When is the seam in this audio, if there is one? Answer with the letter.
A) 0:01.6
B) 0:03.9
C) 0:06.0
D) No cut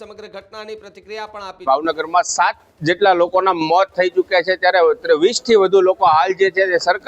A